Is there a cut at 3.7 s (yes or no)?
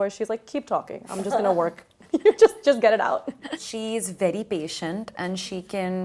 yes